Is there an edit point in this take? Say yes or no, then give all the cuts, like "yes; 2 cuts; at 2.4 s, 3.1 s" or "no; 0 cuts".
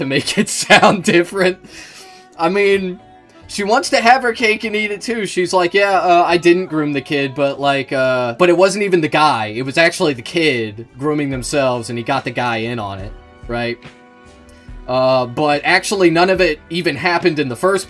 yes; 1 cut; at 8.3 s